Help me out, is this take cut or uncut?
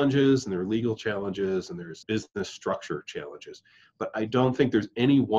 cut